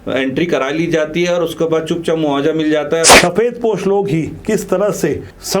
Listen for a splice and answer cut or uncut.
cut